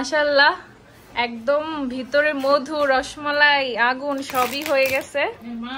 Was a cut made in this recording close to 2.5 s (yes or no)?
no